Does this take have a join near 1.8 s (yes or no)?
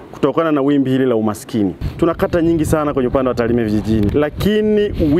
yes